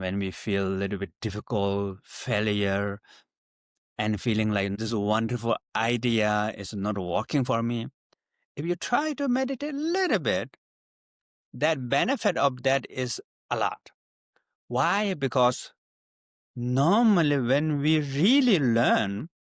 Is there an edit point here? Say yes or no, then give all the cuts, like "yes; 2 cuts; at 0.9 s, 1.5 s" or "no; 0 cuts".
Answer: yes; 1 cut; at 4.8 s